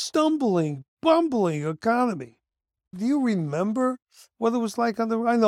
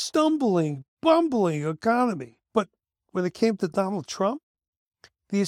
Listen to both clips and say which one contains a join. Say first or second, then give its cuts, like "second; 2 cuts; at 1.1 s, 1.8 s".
second; 1 cut; at 2.3 s